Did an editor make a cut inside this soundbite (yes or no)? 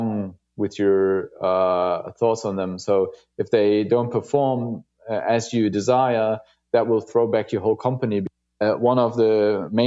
yes